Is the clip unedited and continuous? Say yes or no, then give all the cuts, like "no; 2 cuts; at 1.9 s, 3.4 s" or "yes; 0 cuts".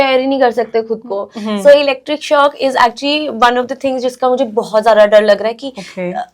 yes; 0 cuts